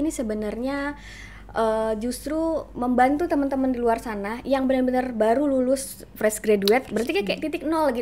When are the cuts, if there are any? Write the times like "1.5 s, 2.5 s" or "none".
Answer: none